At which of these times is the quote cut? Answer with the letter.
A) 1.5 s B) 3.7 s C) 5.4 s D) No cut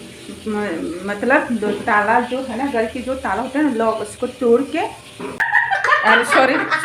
C